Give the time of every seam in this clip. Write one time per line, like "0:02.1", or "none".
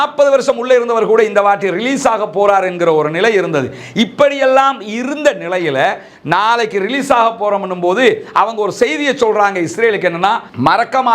none